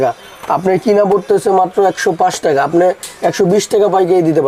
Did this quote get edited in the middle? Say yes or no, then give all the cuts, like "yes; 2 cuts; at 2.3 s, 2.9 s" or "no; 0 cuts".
no; 0 cuts